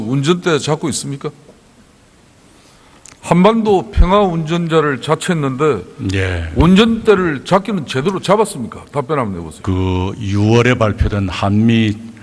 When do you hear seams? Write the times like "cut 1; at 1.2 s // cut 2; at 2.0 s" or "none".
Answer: cut 1; at 7.8 s